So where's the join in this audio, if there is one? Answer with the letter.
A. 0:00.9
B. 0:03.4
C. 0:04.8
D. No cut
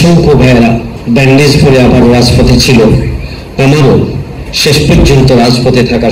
A